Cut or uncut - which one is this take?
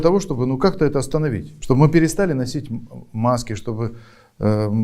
cut